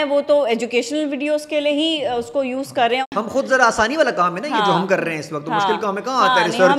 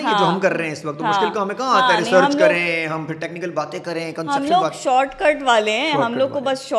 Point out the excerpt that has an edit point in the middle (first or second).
first